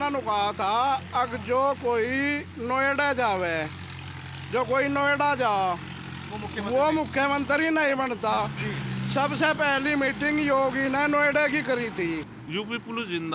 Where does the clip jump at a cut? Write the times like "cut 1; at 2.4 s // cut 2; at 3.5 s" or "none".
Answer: cut 1; at 12.3 s